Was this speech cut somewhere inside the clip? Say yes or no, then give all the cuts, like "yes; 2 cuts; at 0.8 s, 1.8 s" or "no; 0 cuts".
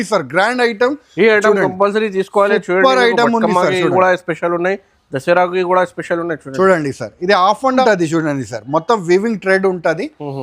yes; 1 cut; at 7.8 s